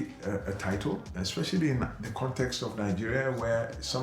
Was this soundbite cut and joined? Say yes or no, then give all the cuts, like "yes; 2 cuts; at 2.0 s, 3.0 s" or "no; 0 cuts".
yes; 1 cut; at 1.1 s